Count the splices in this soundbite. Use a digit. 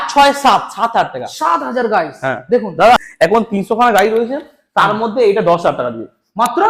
1